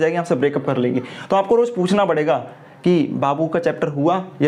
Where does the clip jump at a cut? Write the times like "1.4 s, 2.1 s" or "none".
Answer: none